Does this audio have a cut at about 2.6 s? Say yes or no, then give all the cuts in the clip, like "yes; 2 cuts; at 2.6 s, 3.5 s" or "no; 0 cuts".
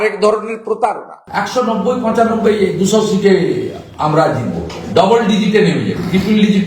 no; 1 cut; at 1.2 s